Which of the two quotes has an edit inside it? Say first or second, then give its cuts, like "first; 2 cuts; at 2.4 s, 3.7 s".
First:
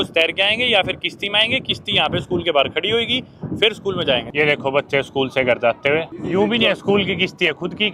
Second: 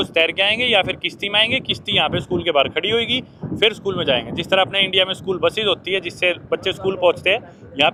first; 2 cuts; at 4.3 s, 6.2 s